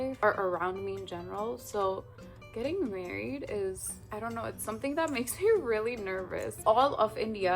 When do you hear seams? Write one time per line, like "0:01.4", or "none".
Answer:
0:06.5